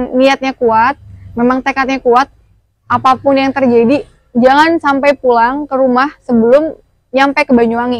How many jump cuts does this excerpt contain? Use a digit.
0